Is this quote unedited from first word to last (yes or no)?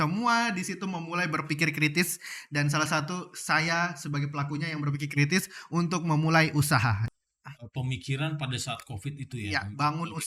no